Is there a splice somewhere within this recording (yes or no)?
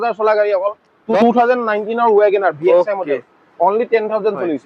yes